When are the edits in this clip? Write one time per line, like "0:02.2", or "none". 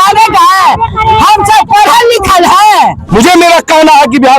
0:03.0